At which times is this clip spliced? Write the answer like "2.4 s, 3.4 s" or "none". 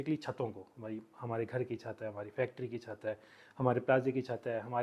none